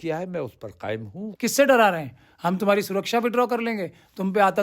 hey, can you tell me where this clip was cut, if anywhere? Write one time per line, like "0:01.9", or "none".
0:01.2